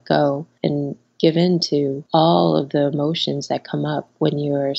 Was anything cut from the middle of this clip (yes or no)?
no